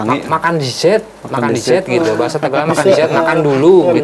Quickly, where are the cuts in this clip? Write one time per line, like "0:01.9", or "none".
none